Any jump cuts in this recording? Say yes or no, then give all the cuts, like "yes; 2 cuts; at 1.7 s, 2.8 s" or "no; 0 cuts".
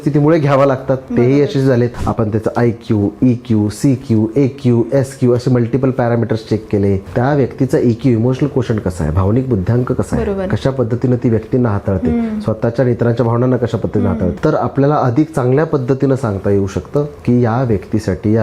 yes; 3 cuts; at 2.0 s, 7.0 s, 14.4 s